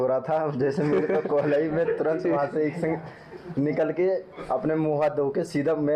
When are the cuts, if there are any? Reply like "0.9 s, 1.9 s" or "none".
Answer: none